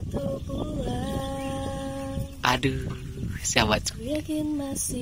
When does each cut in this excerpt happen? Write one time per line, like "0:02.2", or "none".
none